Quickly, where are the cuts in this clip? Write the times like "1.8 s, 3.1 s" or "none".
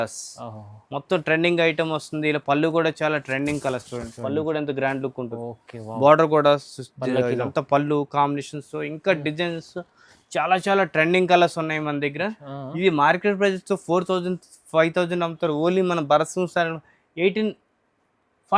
none